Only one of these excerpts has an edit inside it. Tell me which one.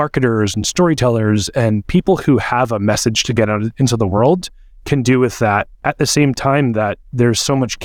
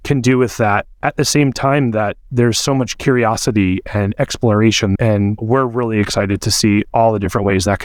second; 1 cut; at 5.4 s

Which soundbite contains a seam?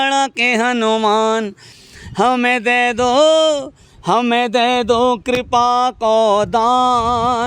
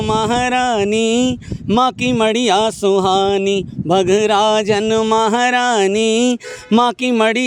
first; 1 cut; at 1.7 s

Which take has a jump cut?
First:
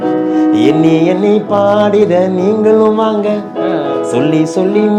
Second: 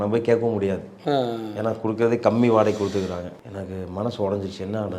second; 1 cut; at 3.3 s

